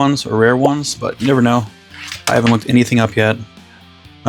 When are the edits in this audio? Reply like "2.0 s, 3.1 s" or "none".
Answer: none